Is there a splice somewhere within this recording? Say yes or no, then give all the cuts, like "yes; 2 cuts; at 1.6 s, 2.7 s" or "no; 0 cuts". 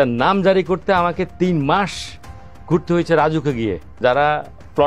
yes; 1 cut; at 4.0 s